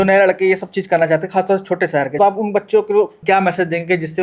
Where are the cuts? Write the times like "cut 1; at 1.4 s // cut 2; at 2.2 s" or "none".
cut 1; at 2.2 s // cut 2; at 3.2 s